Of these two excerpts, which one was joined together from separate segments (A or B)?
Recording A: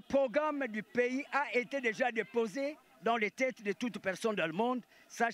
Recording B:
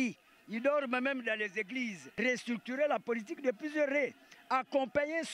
B